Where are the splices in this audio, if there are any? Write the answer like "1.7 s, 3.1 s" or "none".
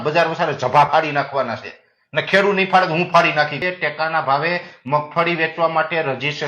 3.6 s